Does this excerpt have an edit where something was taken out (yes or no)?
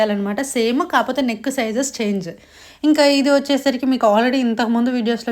no